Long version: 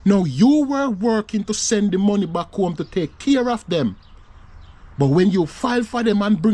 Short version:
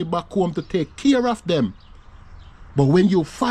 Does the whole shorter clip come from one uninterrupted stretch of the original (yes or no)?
yes